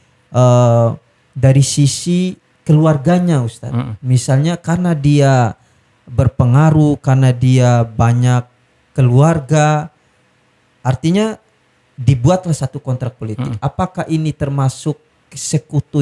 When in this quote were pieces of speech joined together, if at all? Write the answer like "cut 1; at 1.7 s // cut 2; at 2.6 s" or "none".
none